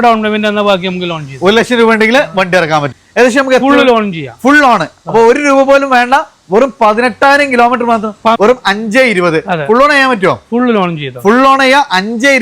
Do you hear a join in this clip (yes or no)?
yes